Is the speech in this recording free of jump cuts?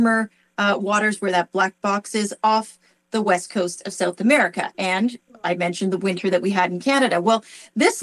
yes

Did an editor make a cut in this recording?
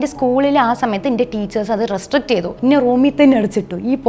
yes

